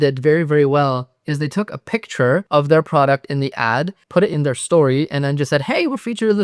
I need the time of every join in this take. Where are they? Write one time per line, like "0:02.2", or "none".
0:02.5